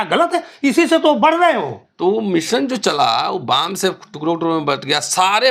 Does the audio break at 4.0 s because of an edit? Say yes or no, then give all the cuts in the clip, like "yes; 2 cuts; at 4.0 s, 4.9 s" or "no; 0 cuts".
no; 1 cut; at 1.8 s